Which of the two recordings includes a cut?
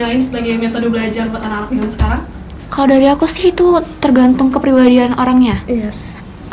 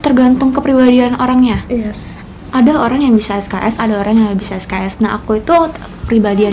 first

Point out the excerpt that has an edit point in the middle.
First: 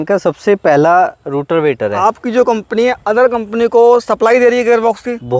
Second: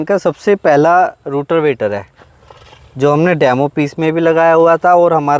first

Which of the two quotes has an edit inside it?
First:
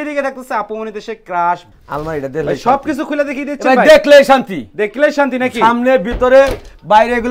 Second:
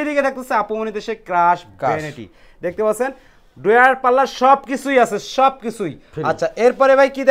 first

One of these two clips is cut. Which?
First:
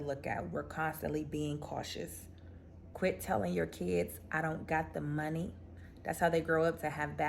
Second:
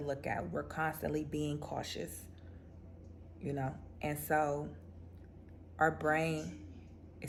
first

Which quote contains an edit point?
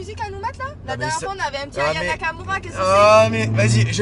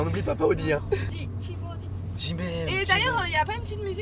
second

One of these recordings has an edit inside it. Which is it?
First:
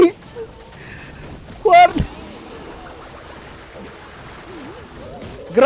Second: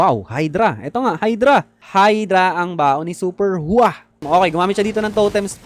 second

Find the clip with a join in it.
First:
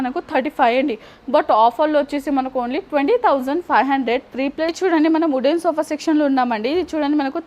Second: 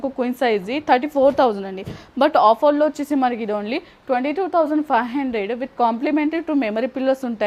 first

